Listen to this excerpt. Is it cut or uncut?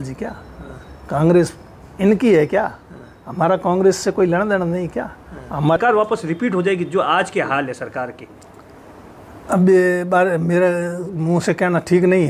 cut